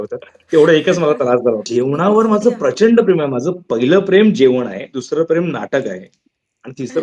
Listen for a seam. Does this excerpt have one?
yes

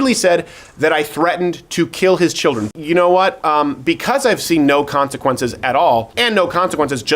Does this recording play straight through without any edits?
no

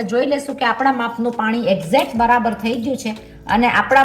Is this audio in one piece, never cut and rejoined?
yes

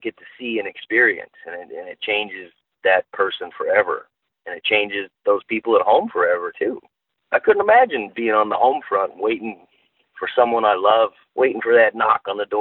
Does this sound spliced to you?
yes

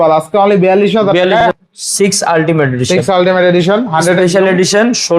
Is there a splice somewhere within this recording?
yes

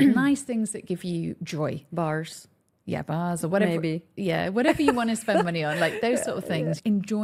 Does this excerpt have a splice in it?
no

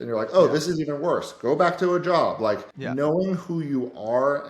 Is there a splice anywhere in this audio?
yes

